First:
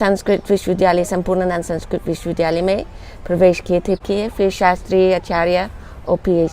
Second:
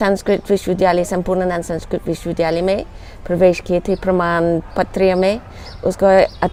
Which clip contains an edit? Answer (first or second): first